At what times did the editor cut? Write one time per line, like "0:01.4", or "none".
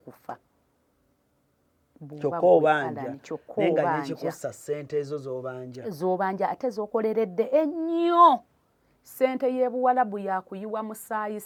none

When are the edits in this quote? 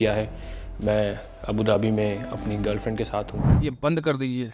0:03.4

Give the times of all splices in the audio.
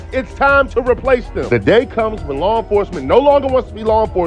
none

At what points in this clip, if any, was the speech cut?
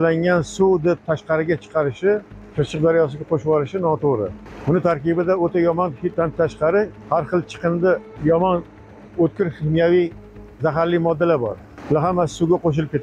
0:02.4
0:04.5
0:06.1
0:07.0
0:08.1
0:11.7

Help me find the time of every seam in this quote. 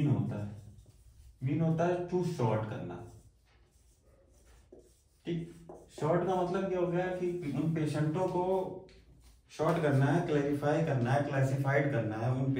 0:05.8

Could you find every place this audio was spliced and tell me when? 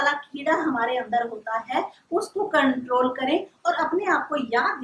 none

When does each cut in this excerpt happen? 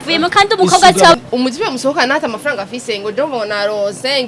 0:01.1

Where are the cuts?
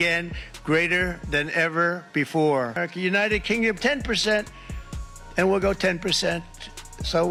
none

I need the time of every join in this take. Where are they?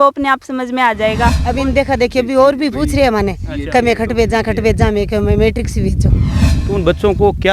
0:01.4
0:06.5

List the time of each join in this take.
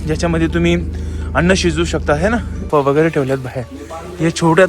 0:02.5

